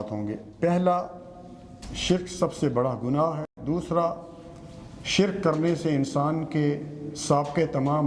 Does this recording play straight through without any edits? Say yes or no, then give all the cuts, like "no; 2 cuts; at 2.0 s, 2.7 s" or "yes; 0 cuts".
yes; 0 cuts